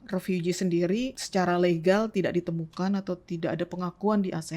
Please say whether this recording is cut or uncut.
cut